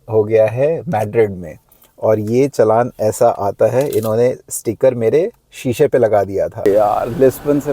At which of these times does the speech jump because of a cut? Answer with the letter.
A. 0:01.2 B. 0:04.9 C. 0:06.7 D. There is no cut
C